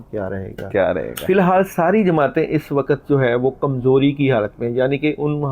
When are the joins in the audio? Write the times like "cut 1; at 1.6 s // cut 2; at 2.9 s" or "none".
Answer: cut 1; at 1.2 s